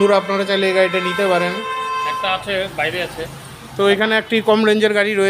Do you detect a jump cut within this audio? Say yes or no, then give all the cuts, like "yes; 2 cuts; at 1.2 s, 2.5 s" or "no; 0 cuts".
yes; 1 cut; at 2.1 s